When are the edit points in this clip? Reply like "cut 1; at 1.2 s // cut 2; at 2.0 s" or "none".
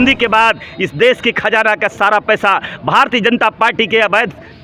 none